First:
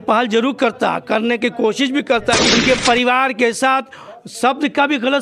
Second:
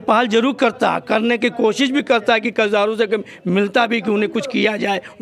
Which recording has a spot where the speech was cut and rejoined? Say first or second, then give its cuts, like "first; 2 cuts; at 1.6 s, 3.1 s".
first; 1 cut; at 2.5 s